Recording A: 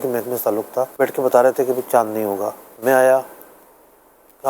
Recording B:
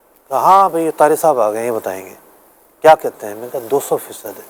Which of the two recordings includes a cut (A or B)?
A